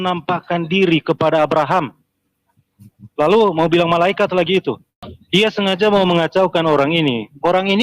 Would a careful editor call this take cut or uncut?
cut